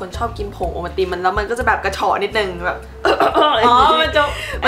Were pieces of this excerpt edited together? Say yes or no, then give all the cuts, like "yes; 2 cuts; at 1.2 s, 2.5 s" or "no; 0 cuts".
no; 0 cuts